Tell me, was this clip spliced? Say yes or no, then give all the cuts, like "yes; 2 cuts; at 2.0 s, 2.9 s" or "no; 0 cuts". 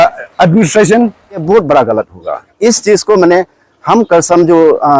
yes; 1 cut; at 1.4 s